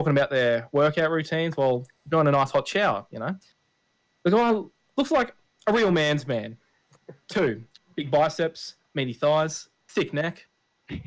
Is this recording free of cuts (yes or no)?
yes